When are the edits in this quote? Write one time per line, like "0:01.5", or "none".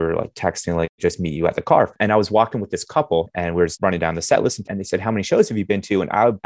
0:00.9
0:01.9
0:03.7
0:04.7